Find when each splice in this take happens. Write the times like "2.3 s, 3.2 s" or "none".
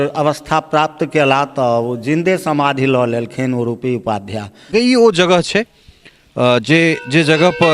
4.7 s